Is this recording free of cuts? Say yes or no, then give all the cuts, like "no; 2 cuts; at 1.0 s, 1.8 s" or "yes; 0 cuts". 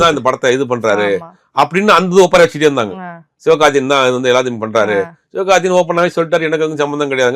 yes; 0 cuts